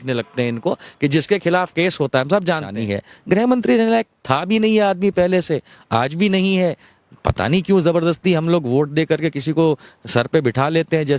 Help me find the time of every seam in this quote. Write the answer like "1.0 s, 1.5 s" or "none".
2.7 s